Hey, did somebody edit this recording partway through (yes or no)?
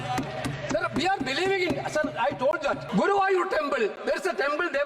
yes